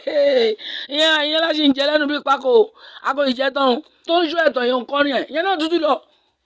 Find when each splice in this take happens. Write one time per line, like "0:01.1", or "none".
0:04.0

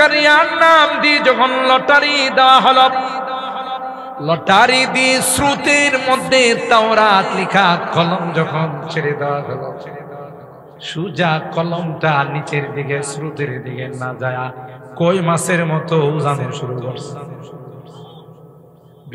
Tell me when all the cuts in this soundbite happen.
none

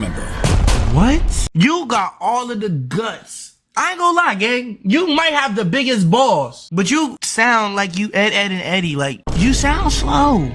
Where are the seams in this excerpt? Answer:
0:01.5
0:06.6

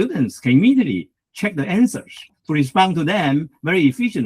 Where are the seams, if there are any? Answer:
0:02.4

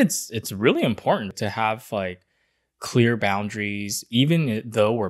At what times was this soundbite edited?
0:01.3

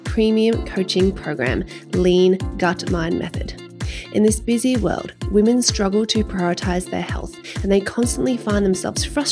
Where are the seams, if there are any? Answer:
0:03.6

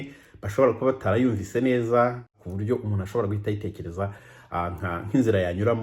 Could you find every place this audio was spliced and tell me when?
0:02.4

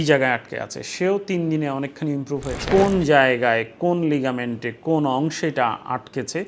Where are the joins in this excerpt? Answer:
0:02.6

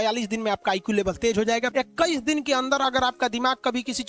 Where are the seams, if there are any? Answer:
0:01.7

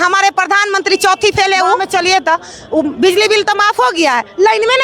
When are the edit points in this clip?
0:01.8

